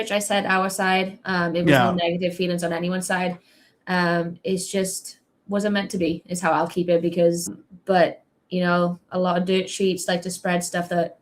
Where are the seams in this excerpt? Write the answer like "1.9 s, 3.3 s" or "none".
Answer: 7.6 s